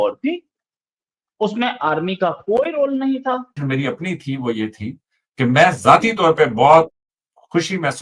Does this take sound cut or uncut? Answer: cut